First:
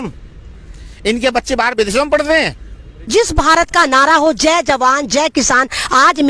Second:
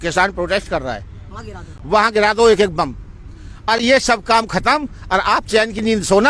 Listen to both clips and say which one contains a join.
first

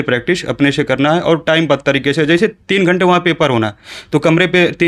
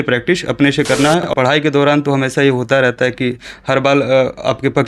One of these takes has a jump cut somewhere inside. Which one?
second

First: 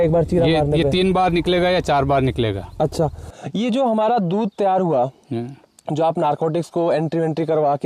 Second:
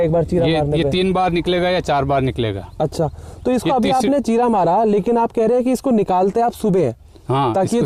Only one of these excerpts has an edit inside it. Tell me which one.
first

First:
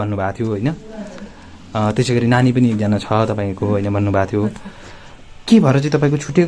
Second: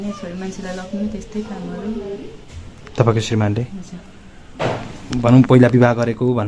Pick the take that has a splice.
second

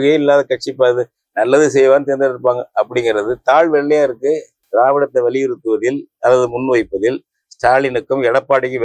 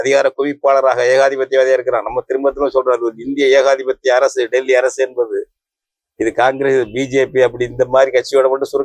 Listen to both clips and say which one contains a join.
first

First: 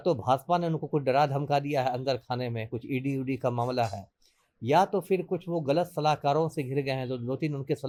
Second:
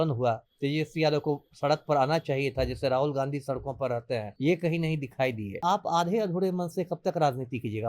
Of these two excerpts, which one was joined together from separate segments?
second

